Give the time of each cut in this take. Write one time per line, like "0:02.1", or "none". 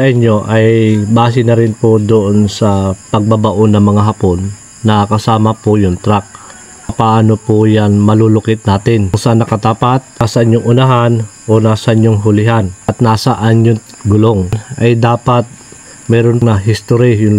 0:06.9
0:09.2
0:10.2
0:12.9
0:14.7
0:16.4